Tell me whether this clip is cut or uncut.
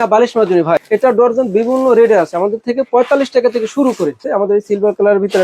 cut